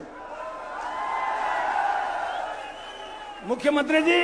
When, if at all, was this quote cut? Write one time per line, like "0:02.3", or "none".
none